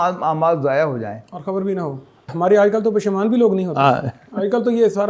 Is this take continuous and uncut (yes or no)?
no